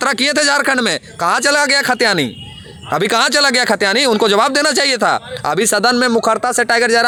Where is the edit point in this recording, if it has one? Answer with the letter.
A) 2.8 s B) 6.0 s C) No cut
C